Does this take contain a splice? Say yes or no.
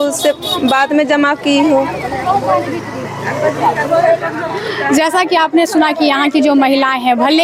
no